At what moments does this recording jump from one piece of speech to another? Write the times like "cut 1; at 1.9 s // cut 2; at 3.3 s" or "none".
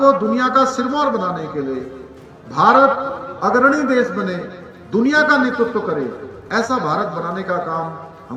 none